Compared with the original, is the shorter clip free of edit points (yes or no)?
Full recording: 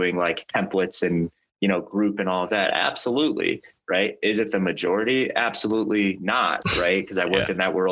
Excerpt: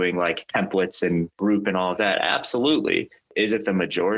no